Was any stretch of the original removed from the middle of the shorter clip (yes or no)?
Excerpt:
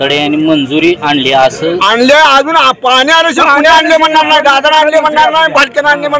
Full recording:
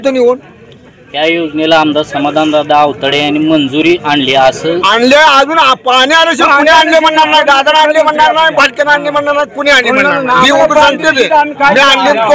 no